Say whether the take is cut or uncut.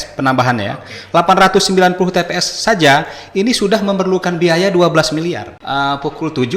cut